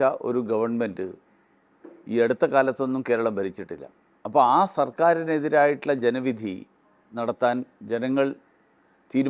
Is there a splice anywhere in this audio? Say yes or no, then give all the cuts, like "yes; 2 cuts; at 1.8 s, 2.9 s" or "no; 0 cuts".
no; 0 cuts